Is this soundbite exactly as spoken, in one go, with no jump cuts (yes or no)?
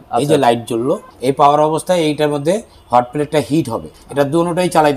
no